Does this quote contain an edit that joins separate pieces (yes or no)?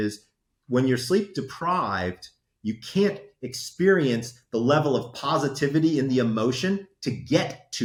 no